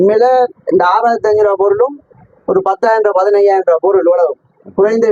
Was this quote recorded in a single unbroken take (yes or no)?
yes